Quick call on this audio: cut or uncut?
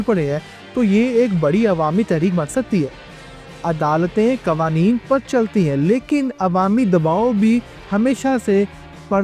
uncut